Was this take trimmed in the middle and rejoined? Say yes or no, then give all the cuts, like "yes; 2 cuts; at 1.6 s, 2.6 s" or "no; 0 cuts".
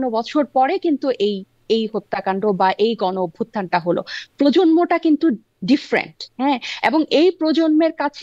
no; 0 cuts